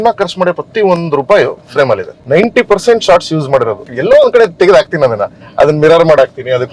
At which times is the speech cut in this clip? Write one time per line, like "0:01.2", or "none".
0:02.1
0:03.9